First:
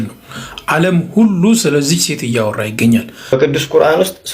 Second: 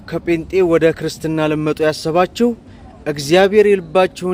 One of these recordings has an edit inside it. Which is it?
first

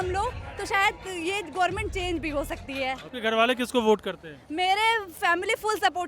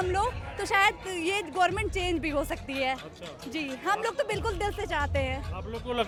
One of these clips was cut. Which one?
first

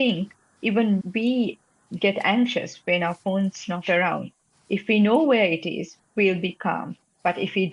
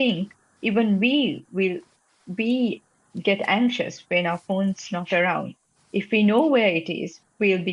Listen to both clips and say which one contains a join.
first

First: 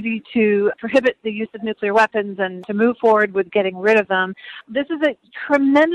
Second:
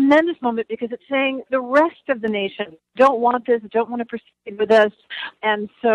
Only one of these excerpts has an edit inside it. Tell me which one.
first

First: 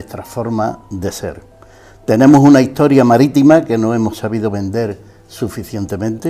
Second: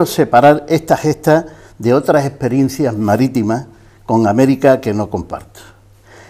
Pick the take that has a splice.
second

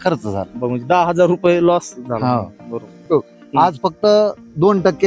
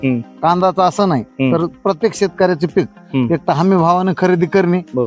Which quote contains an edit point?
first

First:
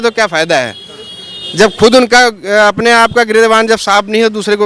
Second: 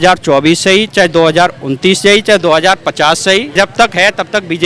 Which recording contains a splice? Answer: second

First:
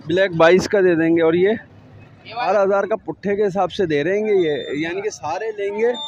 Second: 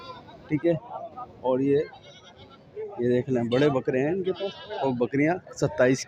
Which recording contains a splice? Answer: first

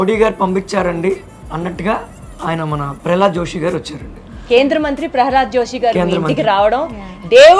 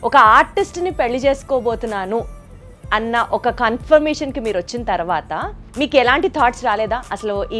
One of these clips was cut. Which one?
second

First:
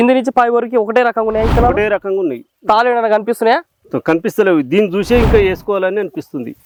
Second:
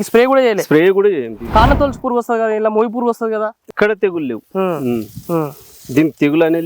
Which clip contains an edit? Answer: second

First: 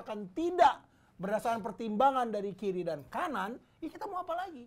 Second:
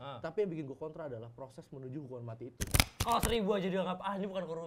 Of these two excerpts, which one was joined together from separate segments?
second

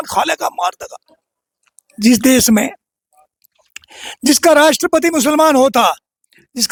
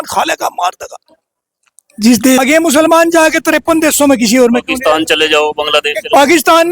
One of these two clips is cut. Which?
second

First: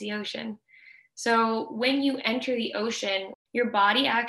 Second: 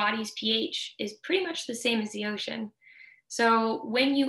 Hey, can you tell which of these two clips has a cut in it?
first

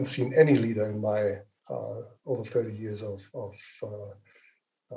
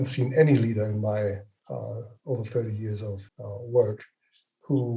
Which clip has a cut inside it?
second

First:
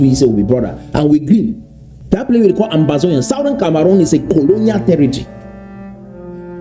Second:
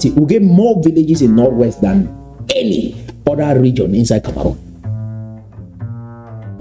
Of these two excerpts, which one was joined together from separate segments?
first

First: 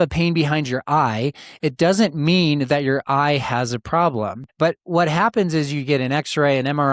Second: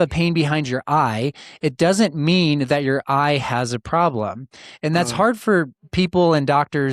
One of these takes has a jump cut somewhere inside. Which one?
first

